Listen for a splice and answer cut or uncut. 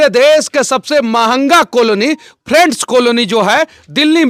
uncut